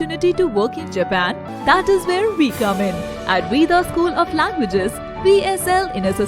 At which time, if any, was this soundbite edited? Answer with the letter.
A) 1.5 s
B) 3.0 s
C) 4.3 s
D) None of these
A